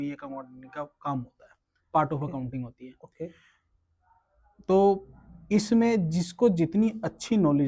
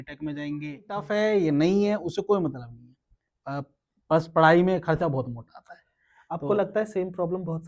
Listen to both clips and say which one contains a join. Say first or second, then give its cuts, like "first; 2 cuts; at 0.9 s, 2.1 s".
second; 1 cut; at 1.1 s